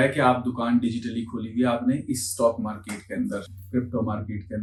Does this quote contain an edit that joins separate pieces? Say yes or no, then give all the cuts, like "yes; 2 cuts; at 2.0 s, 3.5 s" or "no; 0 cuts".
no; 0 cuts